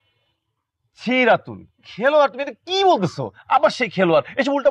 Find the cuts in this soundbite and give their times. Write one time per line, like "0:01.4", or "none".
none